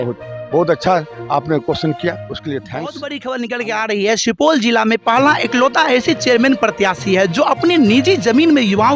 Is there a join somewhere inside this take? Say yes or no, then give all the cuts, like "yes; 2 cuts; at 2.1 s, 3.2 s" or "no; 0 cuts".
yes; 1 cut; at 3.1 s